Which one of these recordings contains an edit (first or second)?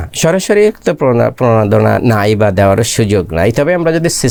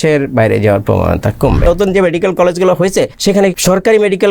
second